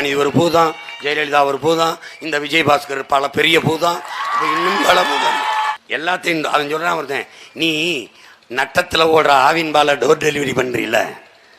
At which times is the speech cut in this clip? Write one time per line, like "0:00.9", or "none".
0:05.7